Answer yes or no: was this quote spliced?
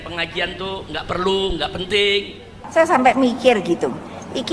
yes